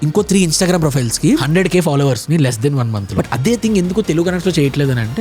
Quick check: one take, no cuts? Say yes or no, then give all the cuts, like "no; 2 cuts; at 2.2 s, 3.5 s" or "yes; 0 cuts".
no; 2 cuts; at 1.4 s, 3.1 s